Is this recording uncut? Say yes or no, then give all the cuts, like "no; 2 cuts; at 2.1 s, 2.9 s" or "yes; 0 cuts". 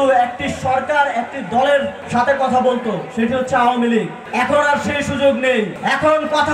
no; 3 cuts; at 2.0 s, 4.2 s, 5.8 s